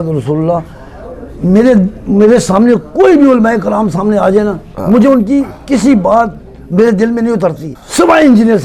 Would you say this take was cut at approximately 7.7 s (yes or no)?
yes